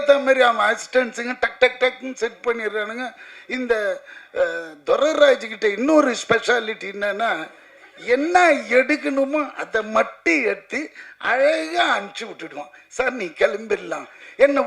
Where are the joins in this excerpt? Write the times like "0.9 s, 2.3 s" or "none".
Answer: none

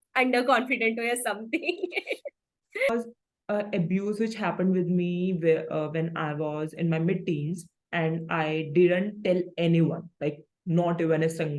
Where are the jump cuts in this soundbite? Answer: 2.9 s

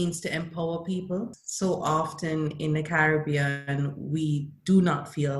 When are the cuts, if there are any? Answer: 1.4 s

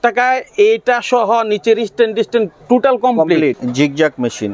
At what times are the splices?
3.6 s

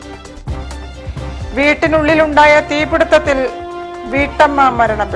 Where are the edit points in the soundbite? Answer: 0.9 s

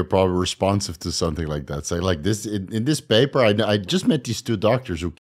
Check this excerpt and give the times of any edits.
none

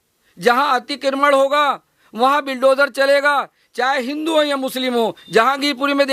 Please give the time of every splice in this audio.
none

